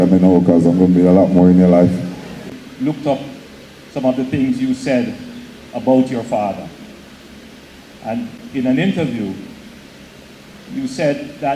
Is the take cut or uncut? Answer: cut